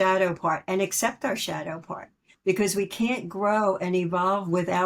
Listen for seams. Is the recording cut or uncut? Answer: uncut